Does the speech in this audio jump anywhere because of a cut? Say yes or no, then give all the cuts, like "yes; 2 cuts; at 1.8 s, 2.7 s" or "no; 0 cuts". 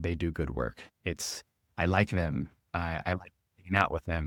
no; 0 cuts